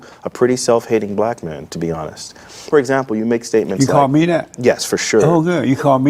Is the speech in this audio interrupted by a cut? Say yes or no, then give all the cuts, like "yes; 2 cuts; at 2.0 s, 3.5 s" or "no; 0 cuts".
yes; 1 cut; at 2.7 s